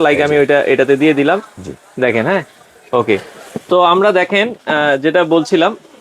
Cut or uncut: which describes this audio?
cut